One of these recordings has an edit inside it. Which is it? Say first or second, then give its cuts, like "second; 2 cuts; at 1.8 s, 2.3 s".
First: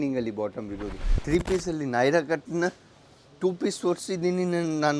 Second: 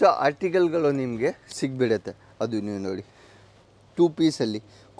first; 1 cut; at 1.1 s